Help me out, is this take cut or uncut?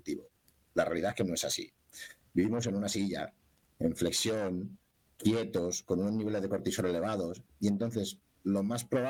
uncut